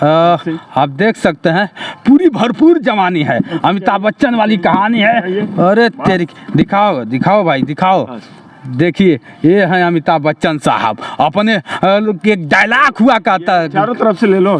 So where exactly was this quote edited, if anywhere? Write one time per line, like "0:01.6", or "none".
none